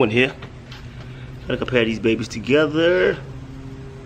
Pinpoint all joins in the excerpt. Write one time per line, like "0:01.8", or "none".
none